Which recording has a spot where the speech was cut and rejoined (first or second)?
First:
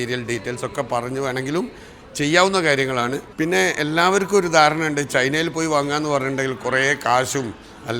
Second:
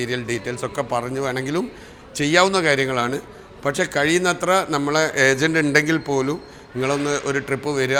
first